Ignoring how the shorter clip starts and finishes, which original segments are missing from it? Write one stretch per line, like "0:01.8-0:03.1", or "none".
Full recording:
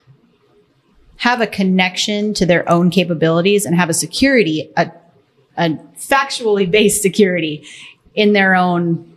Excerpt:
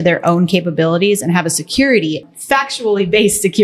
0:04.7-0:05.8